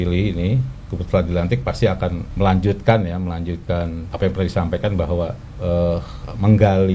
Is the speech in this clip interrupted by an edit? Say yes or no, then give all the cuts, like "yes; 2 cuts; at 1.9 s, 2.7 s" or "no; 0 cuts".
yes; 3 cuts; at 2.2 s, 4.0 s, 5.5 s